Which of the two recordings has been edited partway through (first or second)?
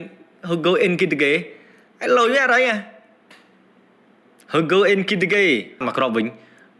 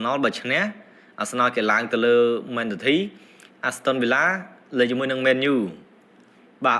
first